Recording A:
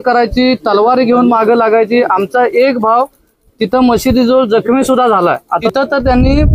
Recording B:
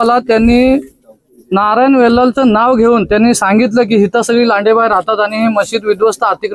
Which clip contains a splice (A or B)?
A